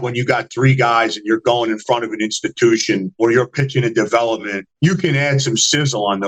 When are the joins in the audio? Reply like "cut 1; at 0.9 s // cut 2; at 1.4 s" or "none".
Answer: none